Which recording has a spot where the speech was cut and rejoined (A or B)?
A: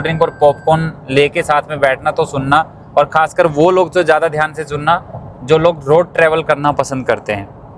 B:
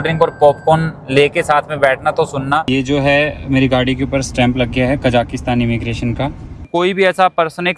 B